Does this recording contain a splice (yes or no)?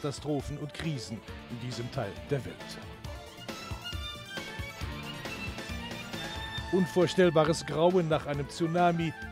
yes